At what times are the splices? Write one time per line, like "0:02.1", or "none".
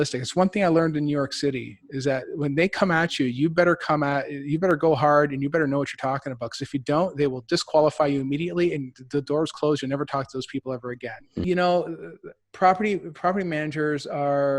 0:11.4

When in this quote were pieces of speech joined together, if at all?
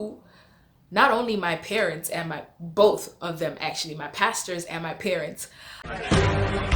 0:05.9

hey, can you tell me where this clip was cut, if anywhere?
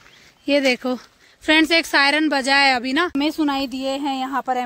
0:03.1

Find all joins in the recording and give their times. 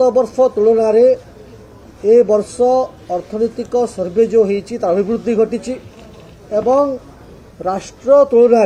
none

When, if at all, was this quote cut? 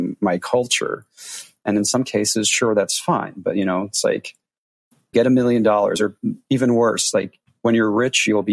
0:05.1

